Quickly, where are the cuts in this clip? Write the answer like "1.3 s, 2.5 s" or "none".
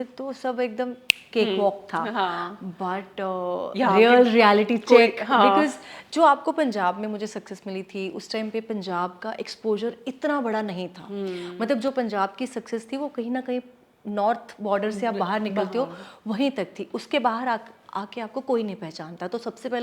none